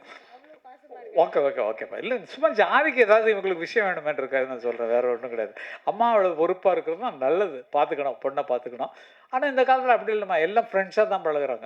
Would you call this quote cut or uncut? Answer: uncut